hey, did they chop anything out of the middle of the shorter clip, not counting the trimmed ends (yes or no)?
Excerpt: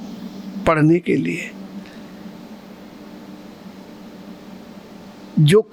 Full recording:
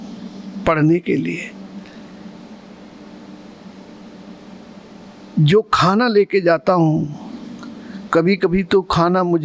no